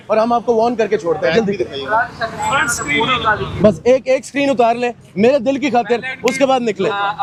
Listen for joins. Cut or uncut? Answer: uncut